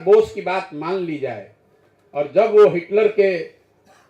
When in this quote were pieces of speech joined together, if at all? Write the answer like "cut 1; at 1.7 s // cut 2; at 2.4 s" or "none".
none